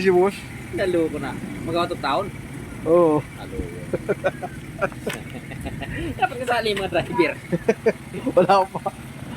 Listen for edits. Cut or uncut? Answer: uncut